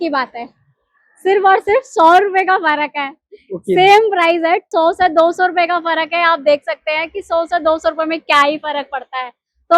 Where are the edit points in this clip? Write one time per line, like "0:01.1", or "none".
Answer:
0:04.7

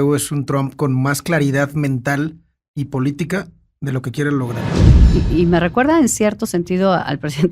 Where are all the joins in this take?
0:04.9

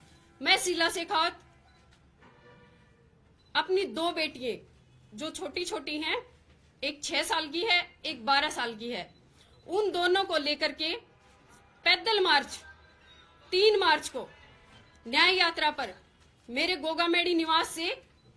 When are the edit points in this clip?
none

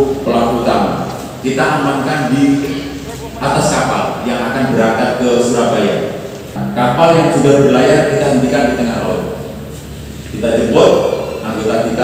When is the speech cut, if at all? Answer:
0:06.6

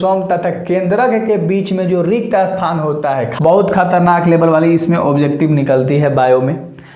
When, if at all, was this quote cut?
0:03.3

